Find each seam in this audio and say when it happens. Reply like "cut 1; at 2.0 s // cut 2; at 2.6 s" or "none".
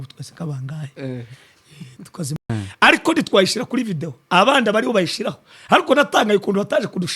cut 1; at 2.5 s

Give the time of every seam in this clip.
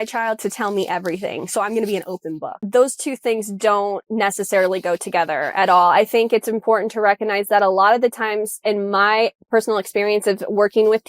cut 1; at 2.7 s

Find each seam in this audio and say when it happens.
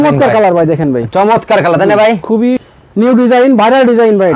cut 1; at 2.6 s

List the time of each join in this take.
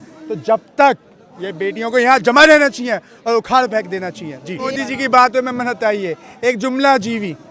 cut 1; at 4.7 s

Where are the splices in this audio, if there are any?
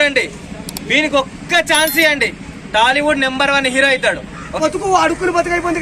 cut 1; at 4.6 s

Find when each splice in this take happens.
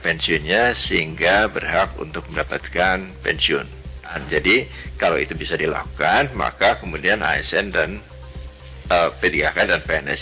cut 1; at 4.2 s

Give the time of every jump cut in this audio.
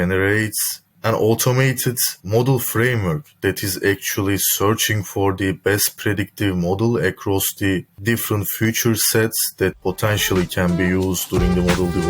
none

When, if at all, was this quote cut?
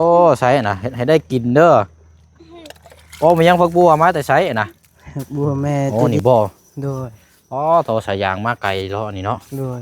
cut 1; at 5.9 s

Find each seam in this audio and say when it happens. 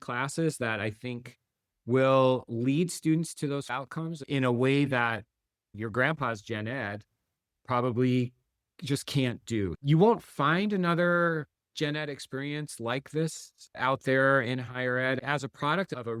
cut 1; at 3.8 s // cut 2; at 15.2 s

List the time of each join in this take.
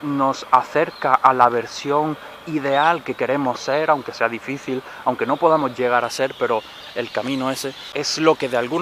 cut 1; at 7.9 s

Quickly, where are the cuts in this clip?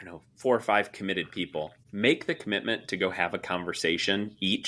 cut 1; at 1.8 s

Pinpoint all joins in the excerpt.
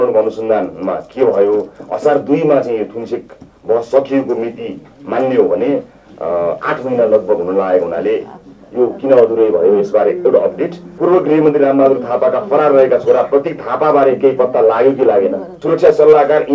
cut 1; at 10.8 s // cut 2; at 15.5 s

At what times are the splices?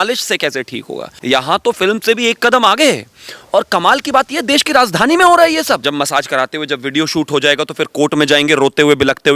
cut 1; at 1.2 s // cut 2; at 5.8 s

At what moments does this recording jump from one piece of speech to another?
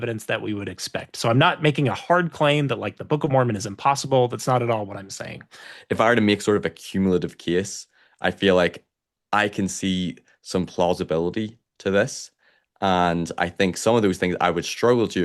cut 1; at 5.7 s

